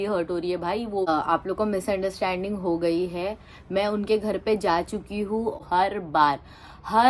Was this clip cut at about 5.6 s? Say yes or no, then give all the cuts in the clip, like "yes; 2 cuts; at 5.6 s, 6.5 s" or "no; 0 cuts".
yes; 2 cuts; at 1.1 s, 5.6 s